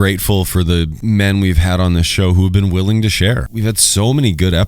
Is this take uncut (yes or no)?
no